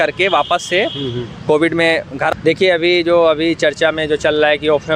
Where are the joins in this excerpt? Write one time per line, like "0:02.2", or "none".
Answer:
0:02.3